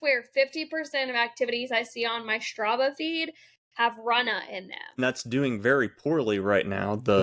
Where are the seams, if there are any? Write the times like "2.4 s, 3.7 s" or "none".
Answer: 5.0 s